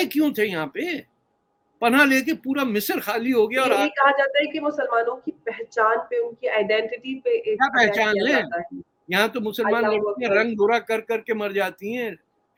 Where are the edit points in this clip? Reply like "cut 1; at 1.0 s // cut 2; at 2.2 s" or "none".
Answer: none